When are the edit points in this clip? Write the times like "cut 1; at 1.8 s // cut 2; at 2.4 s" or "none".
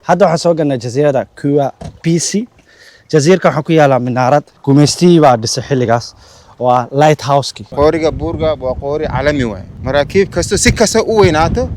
cut 1; at 4.5 s // cut 2; at 7.6 s // cut 3; at 9.7 s